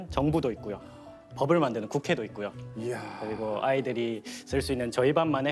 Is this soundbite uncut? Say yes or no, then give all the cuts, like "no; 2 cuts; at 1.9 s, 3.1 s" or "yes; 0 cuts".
yes; 0 cuts